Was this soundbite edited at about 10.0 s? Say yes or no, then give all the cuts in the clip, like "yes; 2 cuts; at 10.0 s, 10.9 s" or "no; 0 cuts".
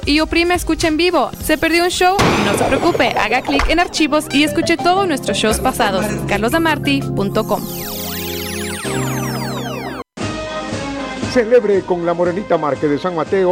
yes; 1 cut; at 10.0 s